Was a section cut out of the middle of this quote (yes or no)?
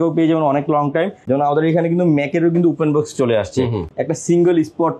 yes